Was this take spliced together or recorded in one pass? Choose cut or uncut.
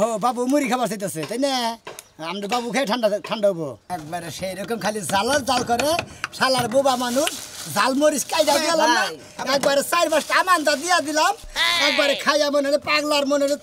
cut